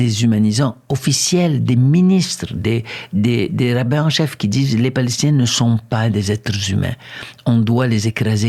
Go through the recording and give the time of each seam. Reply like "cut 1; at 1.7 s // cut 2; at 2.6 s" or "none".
none